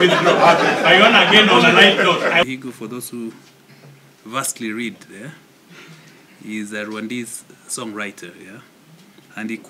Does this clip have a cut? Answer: yes; 1 cut; at 2.4 s

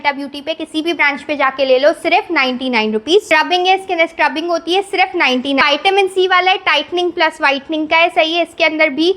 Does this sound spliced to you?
yes; 2 cuts; at 3.3 s, 5.6 s

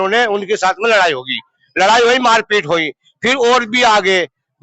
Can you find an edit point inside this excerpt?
no; 0 cuts

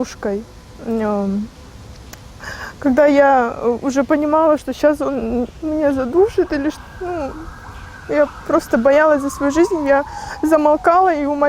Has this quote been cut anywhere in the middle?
no; 0 cuts

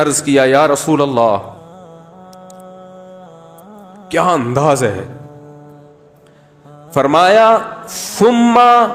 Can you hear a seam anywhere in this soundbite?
yes; 4 cuts; at 1.6 s, 4.1 s, 5.1 s, 6.9 s

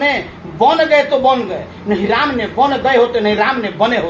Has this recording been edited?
no; 0 cuts

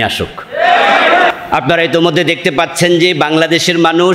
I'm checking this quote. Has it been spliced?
yes; 1 cut; at 1.3 s

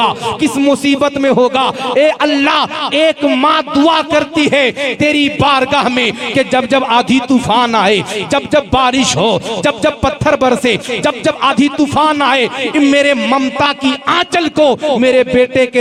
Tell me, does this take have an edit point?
no; 0 cuts

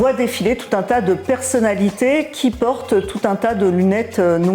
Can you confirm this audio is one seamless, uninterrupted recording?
yes; 0 cuts

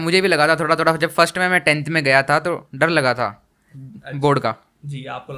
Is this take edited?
no; 0 cuts

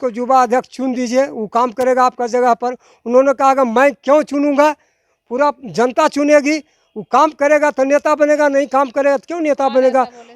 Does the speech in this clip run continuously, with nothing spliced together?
yes; 0 cuts

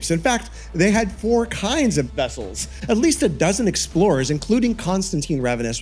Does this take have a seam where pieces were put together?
yes; 1 cut; at 2.5 s

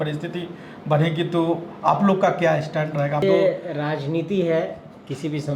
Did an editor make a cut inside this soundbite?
yes; 1 cut; at 3.2 s

